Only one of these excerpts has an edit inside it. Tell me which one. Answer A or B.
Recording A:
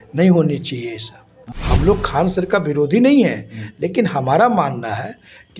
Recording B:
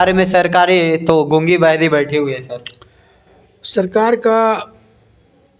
A